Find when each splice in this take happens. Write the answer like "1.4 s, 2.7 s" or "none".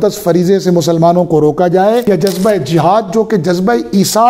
2.0 s